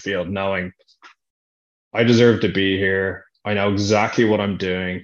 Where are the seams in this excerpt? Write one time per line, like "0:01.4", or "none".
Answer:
none